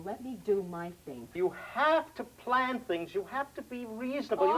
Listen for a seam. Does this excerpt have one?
yes; 1 cut; at 1.3 s

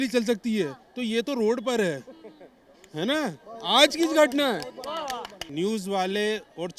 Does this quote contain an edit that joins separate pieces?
yes; 1 cut; at 5.4 s

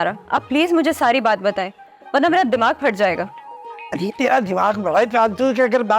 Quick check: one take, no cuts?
yes; 0 cuts

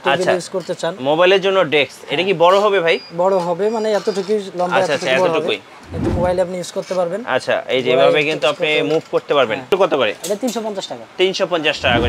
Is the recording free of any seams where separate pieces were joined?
no; 1 cut; at 9.7 s

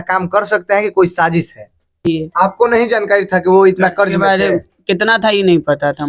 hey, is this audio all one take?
no; 1 cut; at 2.1 s

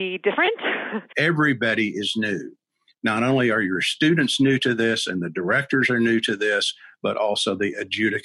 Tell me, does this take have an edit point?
yes; 1 cut; at 1.0 s

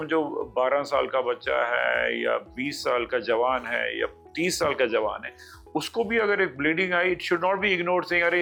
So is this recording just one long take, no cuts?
yes; 0 cuts

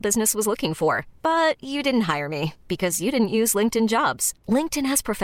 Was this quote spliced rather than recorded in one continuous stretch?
no; 0 cuts

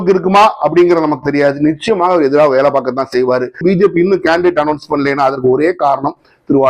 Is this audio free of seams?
no; 1 cut; at 3.6 s

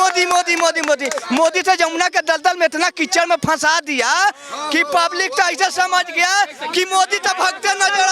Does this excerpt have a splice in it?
no; 0 cuts

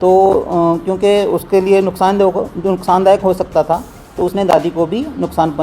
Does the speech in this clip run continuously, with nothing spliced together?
yes; 0 cuts

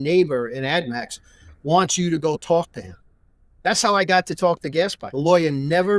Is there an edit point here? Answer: yes; 1 cut; at 5.0 s

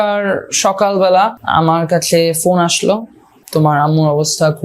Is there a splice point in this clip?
yes; 2 cuts; at 1.4 s, 3.4 s

